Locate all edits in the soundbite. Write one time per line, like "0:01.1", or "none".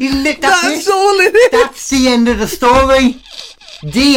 none